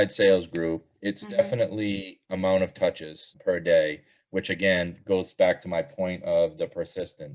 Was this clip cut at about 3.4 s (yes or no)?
yes